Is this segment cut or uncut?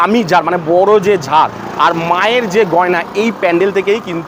uncut